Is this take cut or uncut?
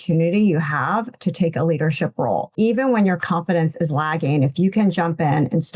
cut